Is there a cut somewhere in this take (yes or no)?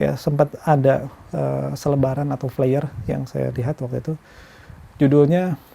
no